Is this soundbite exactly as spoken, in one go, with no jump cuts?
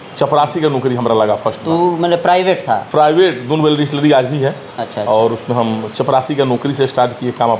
yes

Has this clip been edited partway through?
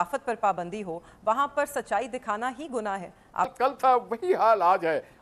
yes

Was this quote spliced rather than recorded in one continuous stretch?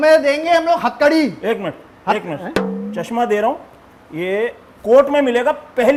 no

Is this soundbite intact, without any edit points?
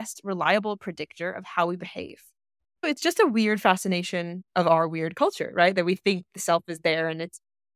no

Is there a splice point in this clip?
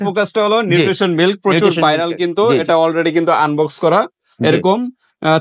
no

